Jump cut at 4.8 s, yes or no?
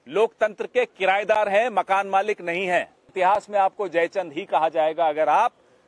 no